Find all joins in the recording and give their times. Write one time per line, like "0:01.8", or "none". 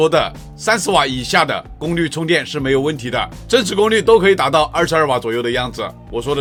none